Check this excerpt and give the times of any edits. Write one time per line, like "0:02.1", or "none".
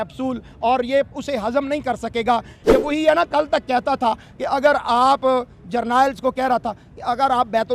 0:02.6